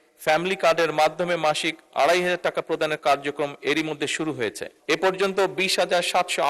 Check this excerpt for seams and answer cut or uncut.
cut